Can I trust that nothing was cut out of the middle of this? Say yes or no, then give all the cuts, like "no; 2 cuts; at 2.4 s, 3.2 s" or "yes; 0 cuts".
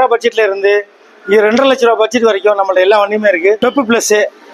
no; 1 cut; at 3.6 s